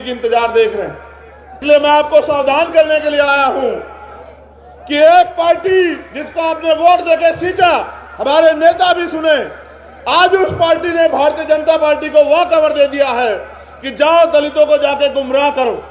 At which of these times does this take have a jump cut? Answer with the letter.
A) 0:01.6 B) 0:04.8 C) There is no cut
A